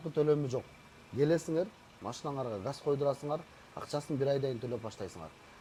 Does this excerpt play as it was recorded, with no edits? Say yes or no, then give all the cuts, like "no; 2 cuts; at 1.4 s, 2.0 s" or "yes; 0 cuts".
yes; 0 cuts